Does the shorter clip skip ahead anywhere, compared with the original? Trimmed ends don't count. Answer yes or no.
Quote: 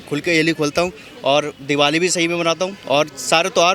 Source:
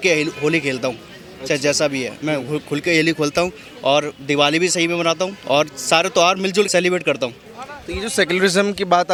no